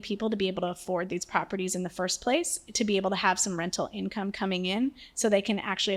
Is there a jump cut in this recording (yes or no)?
no